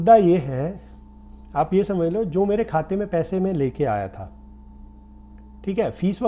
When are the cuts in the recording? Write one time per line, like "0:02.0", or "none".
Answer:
none